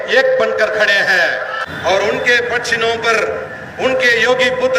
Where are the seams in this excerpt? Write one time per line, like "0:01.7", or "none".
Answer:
0:01.6